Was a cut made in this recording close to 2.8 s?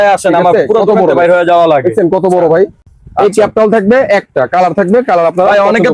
no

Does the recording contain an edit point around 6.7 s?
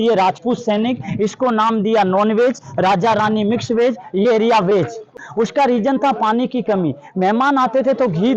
no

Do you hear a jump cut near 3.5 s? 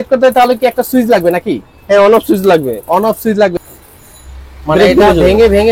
yes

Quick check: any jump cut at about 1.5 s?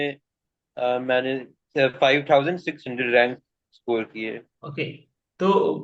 no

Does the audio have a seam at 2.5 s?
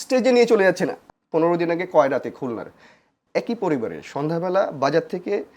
no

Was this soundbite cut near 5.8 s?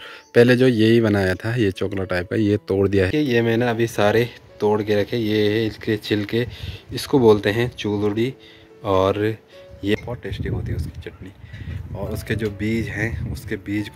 no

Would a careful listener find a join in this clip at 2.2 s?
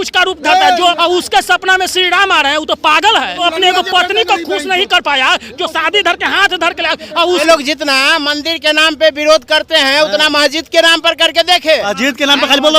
no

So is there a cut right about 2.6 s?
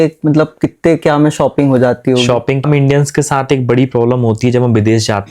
yes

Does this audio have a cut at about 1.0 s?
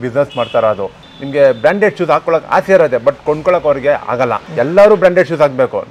yes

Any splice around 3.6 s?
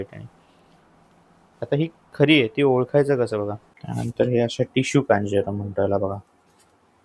yes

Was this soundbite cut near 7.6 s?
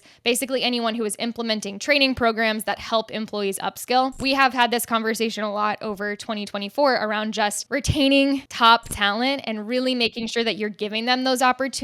yes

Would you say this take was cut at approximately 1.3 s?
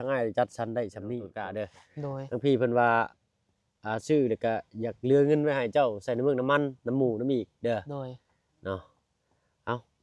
yes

